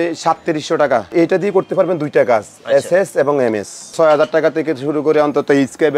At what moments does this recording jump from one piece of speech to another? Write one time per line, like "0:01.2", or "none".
0:01.1
0:03.9